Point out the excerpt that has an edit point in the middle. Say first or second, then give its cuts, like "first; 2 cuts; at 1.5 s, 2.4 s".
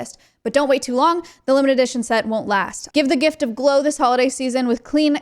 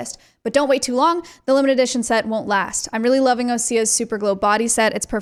first; 1 cut; at 2.8 s